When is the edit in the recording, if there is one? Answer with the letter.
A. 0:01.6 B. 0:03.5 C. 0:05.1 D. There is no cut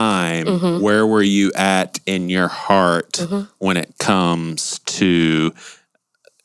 D